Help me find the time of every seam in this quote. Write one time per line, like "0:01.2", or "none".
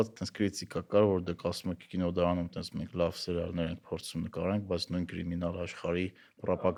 none